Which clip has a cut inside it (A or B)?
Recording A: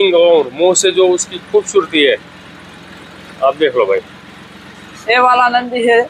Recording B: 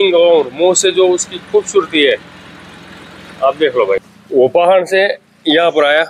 B